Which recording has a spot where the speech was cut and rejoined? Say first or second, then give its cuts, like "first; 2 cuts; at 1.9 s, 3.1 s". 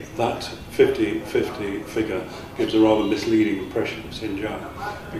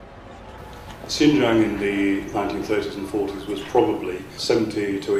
first; 1 cut; at 2.7 s